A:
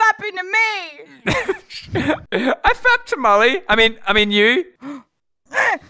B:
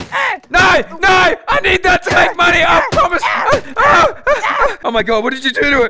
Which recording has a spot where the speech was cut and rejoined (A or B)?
A